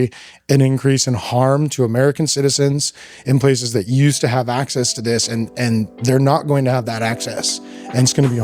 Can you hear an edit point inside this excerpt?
no; 0 cuts

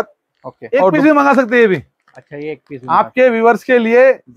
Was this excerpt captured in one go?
no; 1 cut; at 0.9 s

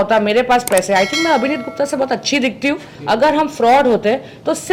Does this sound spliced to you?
yes; 1 cut; at 2.9 s

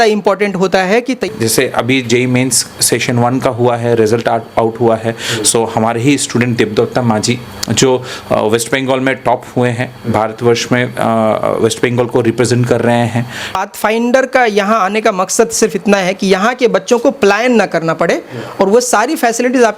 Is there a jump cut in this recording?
yes; 2 cuts; at 1.2 s, 13.5 s

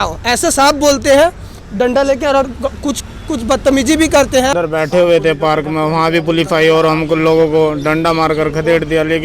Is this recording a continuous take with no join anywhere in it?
no; 1 cut; at 4.5 s

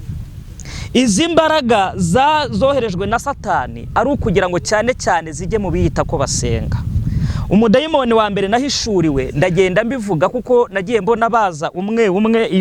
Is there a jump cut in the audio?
no; 0 cuts

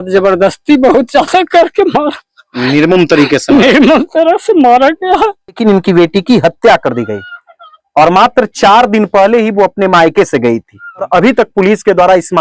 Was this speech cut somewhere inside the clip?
yes; 2 cuts; at 5.6 s, 11.1 s

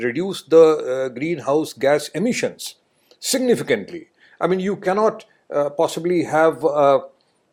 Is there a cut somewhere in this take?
no; 0 cuts

